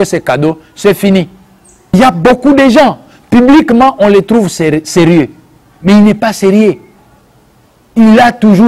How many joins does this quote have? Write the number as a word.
one